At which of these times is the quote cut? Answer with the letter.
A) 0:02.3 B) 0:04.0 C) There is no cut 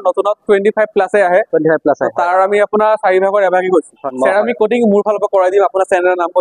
B